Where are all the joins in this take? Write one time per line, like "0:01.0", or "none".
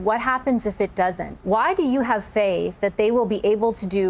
0:01.3